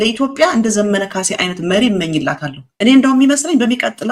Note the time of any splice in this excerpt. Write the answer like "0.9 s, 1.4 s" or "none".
2.7 s